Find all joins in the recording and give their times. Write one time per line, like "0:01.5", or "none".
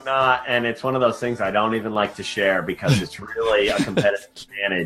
none